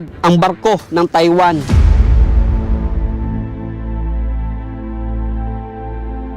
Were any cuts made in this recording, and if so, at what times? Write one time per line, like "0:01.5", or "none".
0:01.6

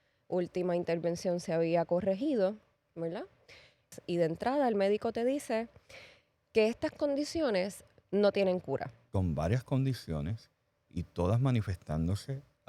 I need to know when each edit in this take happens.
0:03.9
0:09.0

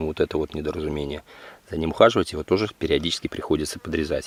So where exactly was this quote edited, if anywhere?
none

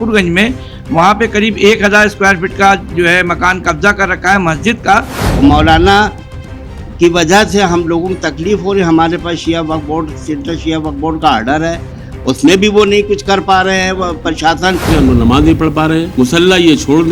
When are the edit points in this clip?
0:05.2
0:14.9
0:16.1

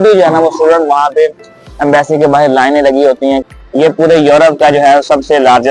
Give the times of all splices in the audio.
0:03.4

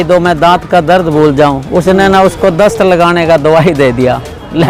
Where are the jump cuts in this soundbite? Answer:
none

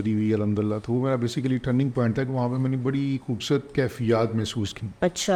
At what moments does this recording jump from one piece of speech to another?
none

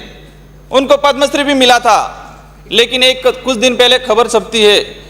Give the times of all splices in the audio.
none

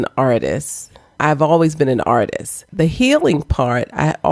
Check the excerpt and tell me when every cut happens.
0:01.1
0:02.7

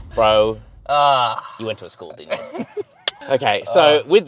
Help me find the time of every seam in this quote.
none

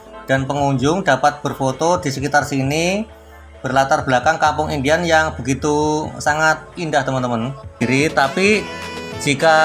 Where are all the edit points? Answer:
0:07.8

